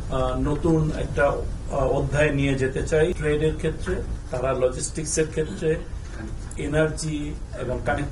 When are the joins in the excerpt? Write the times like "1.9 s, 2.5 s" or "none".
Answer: 3.2 s, 4.2 s